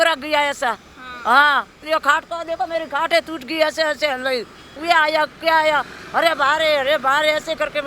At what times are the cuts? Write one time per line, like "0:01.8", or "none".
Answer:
0:04.7